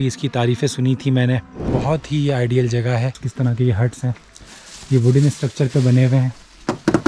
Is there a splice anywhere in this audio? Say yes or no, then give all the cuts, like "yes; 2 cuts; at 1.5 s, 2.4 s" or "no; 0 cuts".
yes; 2 cuts; at 1.7 s, 3.2 s